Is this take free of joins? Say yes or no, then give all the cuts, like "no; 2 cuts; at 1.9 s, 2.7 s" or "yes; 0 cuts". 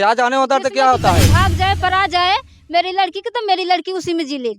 no; 1 cut; at 1.3 s